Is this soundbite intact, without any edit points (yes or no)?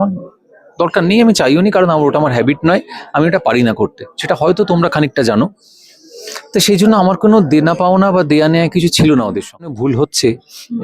no